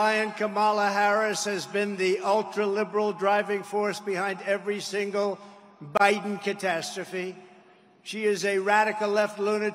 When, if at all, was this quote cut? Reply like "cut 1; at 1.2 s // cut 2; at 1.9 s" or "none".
none